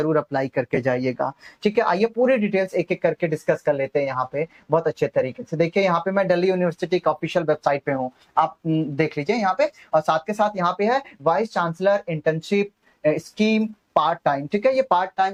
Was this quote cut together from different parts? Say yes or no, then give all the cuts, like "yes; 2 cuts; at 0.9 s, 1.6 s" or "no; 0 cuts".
no; 0 cuts